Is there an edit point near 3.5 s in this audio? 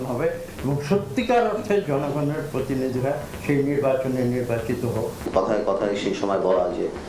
no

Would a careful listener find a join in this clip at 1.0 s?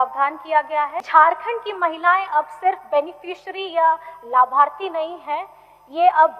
yes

